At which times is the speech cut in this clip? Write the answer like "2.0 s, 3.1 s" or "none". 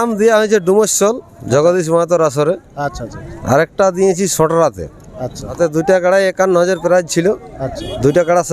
5.6 s